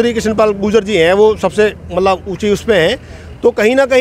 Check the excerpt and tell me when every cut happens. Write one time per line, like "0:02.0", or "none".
none